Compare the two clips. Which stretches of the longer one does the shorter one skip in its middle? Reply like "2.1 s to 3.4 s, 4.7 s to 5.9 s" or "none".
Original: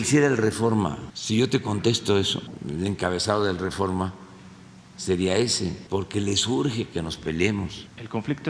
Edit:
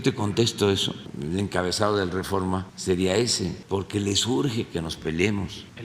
4.2 s to 4.9 s